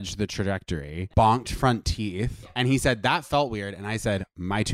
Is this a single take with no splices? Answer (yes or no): no